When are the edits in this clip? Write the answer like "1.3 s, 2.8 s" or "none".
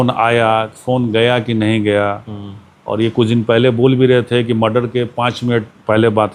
none